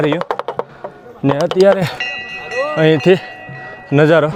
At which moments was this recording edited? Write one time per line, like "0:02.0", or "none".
none